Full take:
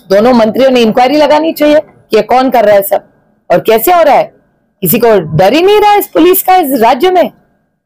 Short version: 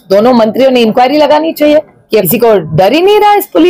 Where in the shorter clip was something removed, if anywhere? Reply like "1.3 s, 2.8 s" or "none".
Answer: 2.2 s